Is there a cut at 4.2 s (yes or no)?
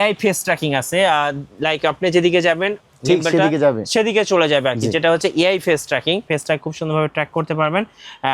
no